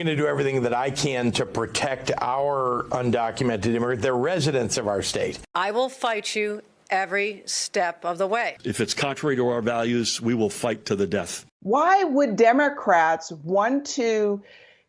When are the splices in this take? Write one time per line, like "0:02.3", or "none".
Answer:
0:11.4